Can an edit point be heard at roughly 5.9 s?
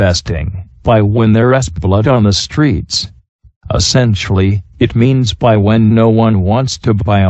yes; 1 cut; at 5.9 s

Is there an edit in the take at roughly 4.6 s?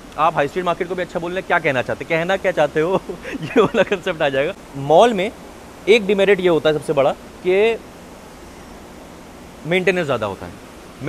yes; 1 cut; at 4.6 s

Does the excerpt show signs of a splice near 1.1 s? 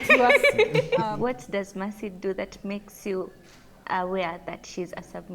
yes; 1 cut; at 1.1 s

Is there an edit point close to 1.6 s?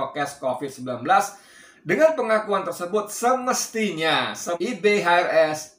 no; 1 cut; at 4.6 s

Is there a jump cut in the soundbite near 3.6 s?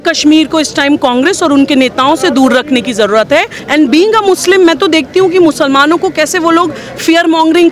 yes; 1 cut; at 3.6 s

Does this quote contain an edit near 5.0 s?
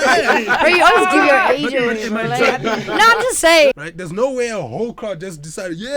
no; 1 cut; at 3.8 s

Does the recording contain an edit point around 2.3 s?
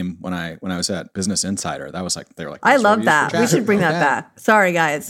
no; 0 cuts

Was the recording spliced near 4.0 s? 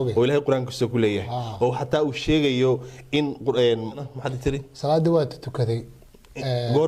yes; 1 cut; at 4.0 s

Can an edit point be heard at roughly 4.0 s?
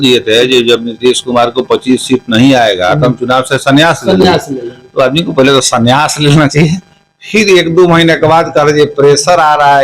no; 0 cuts

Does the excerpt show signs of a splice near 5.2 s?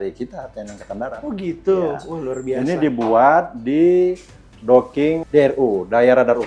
yes; 1 cut; at 5.2 s

